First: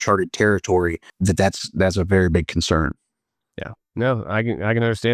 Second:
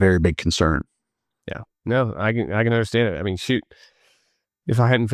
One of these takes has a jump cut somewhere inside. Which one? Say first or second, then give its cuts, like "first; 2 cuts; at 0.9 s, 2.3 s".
first; 1 cut; at 1.1 s